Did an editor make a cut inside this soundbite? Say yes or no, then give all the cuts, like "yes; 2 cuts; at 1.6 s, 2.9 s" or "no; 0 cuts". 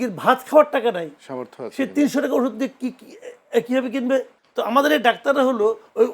yes; 1 cut; at 4.4 s